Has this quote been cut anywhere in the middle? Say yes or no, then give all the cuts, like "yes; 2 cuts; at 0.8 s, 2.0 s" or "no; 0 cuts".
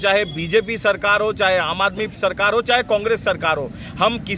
no; 0 cuts